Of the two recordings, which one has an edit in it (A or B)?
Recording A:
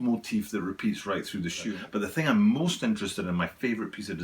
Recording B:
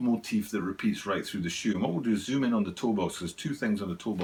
A